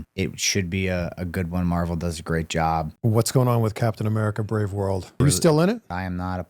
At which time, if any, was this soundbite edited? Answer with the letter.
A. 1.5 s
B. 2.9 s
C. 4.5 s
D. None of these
B